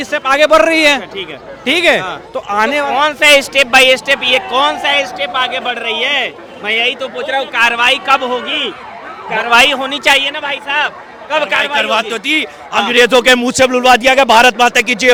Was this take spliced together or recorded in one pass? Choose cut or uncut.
uncut